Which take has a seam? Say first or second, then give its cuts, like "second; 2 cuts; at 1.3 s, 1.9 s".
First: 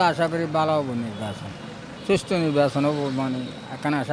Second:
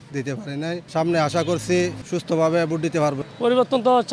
second; 3 cuts; at 0.8 s, 2.0 s, 3.2 s